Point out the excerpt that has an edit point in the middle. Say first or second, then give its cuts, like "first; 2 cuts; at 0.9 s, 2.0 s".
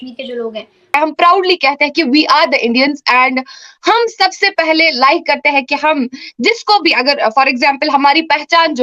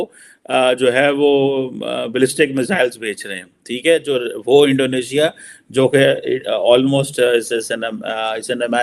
first; 1 cut; at 0.9 s